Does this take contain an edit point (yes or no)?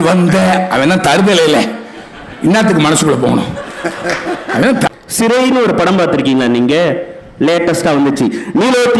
yes